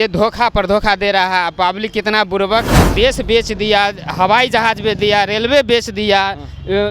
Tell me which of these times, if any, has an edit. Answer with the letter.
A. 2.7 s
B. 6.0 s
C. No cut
A